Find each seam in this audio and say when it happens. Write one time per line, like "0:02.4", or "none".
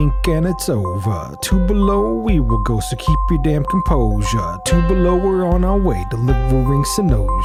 none